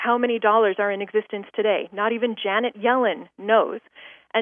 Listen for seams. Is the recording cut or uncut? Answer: uncut